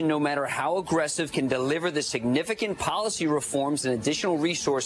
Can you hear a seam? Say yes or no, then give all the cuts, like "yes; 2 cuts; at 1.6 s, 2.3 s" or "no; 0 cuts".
no; 0 cuts